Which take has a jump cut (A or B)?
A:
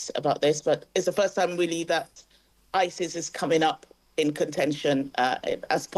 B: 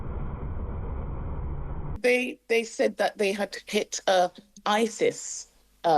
B